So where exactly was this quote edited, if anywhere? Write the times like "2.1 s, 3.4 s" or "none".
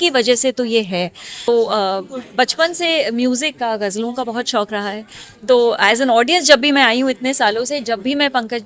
1.5 s

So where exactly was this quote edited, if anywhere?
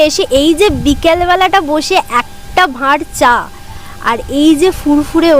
none

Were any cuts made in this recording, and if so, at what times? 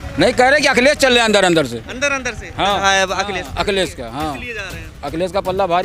2.8 s

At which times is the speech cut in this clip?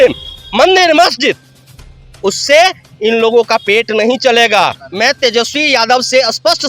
4.8 s

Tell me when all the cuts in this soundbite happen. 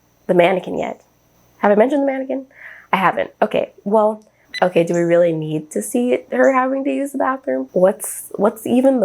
4.4 s, 7.7 s

